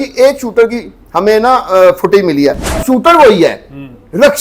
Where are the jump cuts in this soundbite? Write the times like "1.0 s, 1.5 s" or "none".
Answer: 2.8 s